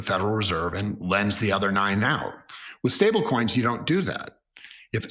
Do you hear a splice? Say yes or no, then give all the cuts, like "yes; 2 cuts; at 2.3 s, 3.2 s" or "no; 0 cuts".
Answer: no; 0 cuts